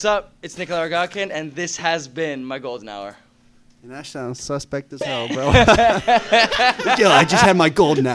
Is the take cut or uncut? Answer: uncut